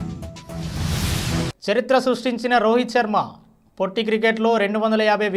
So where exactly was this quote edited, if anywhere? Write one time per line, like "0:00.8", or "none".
0:01.5

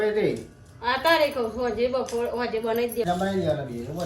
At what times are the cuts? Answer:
0:03.1

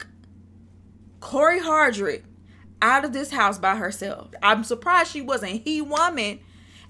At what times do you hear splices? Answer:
0:04.4

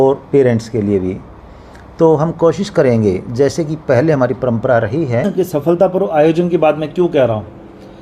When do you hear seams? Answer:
0:05.3

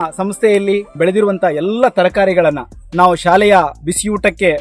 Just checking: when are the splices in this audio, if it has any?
0:00.9

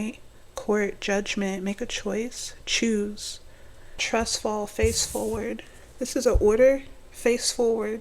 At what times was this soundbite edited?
0:04.0

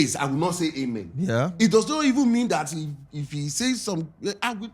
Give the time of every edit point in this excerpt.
none

